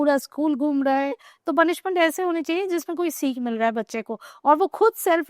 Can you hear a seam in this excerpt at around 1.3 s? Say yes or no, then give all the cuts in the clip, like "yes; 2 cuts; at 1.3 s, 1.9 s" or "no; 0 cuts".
yes; 1 cut; at 1.3 s